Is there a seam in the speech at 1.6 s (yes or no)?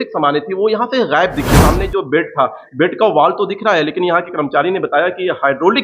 yes